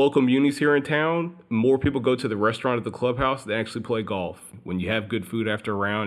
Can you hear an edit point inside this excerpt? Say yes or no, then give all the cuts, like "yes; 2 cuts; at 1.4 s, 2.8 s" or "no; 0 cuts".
yes; 1 cut; at 4.5 s